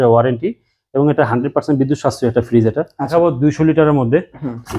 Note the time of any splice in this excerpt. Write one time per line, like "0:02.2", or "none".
0:03.1